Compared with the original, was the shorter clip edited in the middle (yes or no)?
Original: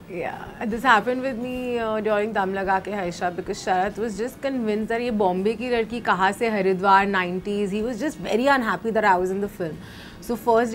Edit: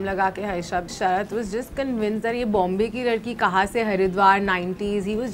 yes